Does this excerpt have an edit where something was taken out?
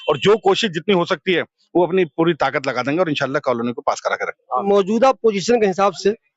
yes; 1 cut; at 4.7 s

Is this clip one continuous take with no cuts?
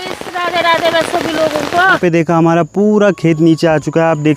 no; 1 cut; at 2.0 s

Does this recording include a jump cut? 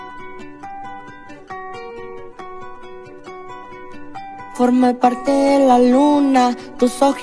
yes; 1 cut; at 2.3 s

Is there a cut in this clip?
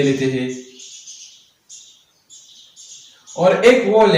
no; 0 cuts

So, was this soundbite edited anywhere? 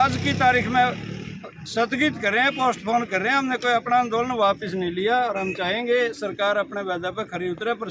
no; 0 cuts

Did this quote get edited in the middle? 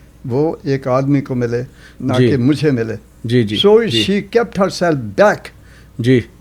no; 0 cuts

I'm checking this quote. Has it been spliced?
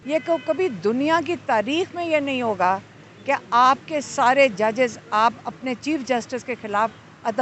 no; 0 cuts

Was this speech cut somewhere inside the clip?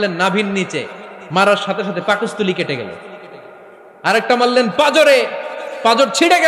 no; 0 cuts

